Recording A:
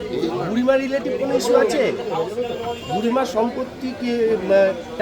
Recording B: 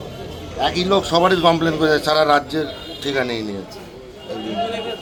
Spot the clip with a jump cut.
A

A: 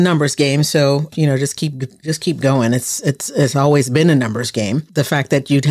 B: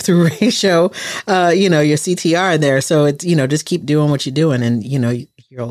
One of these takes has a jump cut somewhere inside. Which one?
A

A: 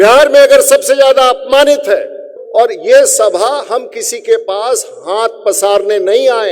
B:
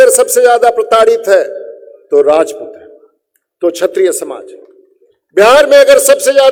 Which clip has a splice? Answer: A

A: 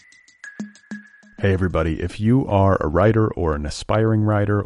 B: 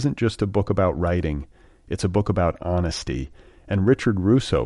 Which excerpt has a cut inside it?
A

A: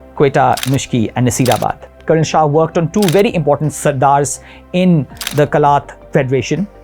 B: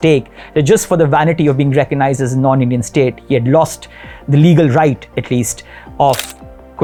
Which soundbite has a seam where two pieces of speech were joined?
A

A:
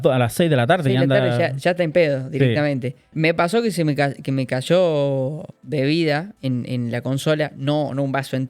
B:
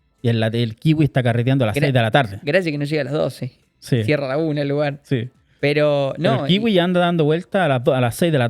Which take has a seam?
A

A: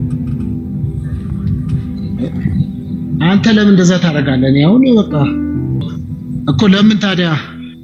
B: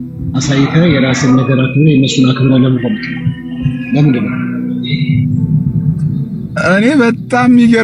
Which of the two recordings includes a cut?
A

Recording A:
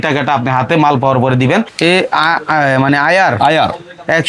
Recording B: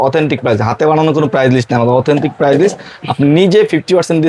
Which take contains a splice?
A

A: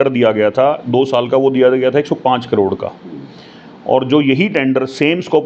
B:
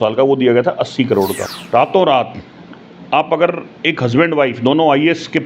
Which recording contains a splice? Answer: B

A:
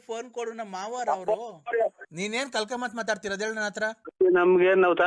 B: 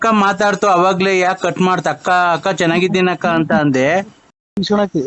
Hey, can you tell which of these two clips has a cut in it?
A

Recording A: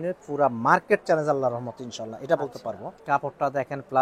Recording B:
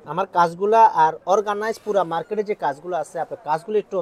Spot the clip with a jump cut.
A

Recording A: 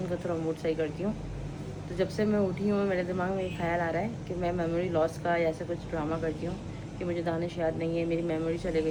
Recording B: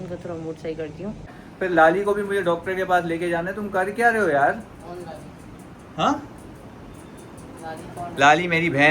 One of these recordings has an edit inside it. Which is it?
B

